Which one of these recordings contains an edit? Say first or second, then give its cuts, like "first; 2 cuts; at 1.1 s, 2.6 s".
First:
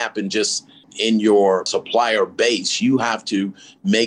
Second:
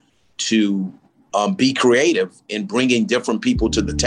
first; 2 cuts; at 0.9 s, 1.8 s